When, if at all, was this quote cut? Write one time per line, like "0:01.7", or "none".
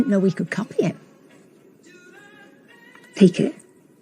0:02.7